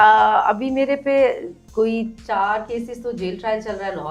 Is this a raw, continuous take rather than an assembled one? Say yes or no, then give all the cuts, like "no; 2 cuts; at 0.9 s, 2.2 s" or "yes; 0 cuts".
yes; 0 cuts